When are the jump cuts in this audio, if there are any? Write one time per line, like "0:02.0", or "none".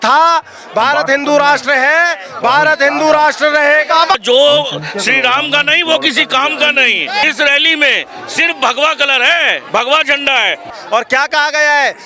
0:04.2
0:07.2
0:10.7